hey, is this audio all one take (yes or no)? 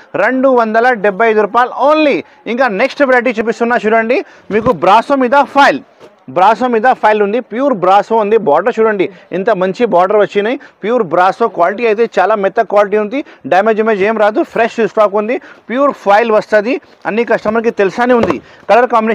yes